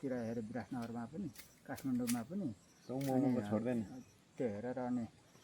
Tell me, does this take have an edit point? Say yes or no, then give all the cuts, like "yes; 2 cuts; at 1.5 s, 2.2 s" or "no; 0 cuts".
no; 0 cuts